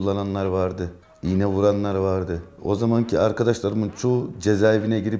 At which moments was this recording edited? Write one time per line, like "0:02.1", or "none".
none

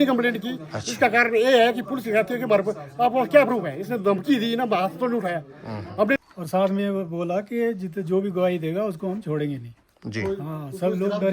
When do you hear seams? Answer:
0:06.2

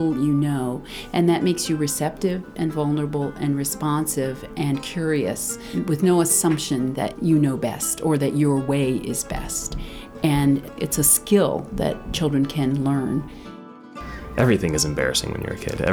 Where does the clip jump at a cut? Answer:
0:05.7
0:07.1
0:10.7
0:12.1
0:13.7

